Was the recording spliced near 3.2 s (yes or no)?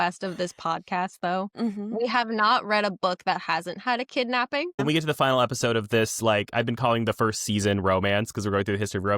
no